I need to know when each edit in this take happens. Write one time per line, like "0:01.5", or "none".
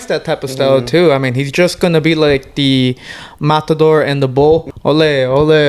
0:04.7